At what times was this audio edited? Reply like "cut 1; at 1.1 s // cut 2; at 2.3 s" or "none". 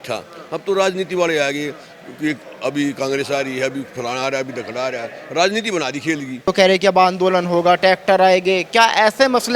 cut 1; at 6.5 s